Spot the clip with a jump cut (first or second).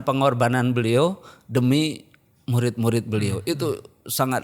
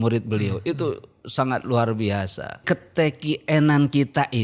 second